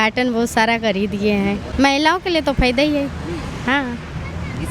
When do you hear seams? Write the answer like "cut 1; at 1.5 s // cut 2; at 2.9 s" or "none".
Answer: cut 1; at 1.6 s